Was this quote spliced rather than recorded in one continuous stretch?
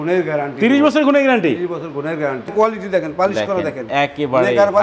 yes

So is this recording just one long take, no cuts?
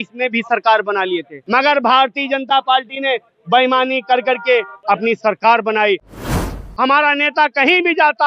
no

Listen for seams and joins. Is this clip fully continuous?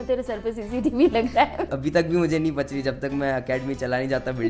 no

